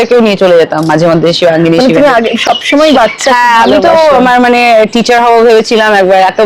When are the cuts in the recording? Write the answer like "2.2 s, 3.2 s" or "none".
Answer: none